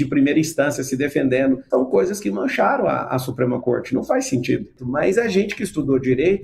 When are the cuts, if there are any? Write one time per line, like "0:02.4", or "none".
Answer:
0:01.6
0:04.8